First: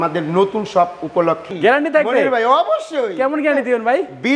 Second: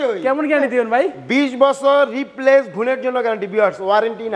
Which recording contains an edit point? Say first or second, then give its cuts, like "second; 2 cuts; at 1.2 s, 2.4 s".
first; 1 cut; at 1.5 s